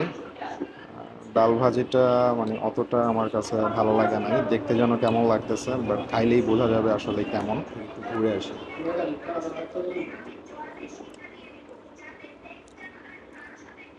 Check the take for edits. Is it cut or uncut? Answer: cut